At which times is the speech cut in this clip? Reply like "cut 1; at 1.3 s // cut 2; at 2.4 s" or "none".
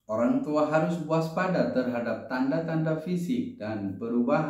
none